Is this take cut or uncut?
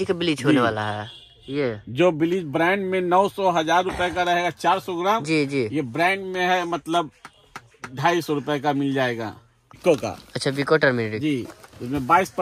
cut